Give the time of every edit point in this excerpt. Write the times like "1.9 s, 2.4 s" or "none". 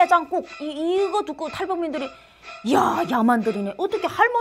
none